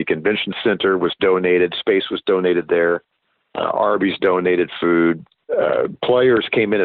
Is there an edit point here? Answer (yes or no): yes